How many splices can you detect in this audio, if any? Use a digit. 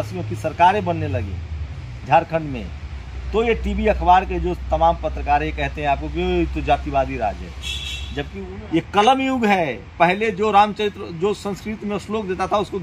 1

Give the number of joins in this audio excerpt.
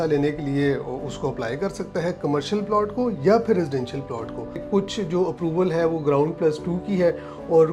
1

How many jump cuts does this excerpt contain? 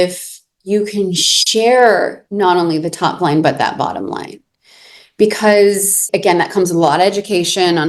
1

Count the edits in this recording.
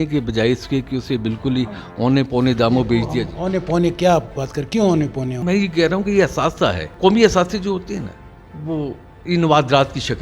2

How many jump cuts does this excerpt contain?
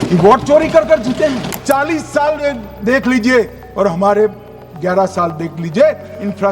1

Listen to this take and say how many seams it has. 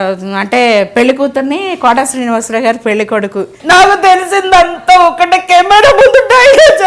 1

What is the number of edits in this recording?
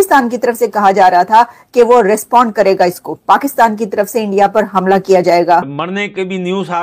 1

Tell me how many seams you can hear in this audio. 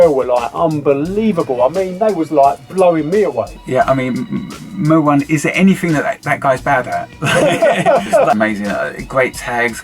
1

